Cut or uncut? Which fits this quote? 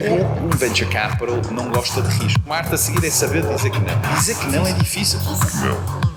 uncut